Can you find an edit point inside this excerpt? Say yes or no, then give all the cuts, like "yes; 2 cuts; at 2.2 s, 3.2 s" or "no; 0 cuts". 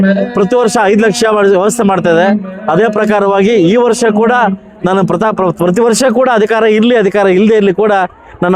no; 0 cuts